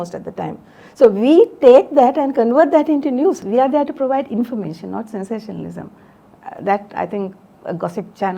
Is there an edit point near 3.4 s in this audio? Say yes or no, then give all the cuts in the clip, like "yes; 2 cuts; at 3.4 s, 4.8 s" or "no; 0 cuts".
yes; 1 cut; at 3.4 s